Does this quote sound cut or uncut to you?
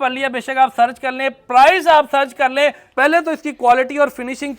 cut